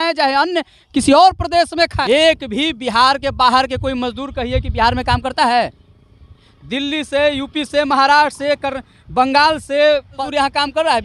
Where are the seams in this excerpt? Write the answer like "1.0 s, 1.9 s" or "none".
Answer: 2.0 s, 10.2 s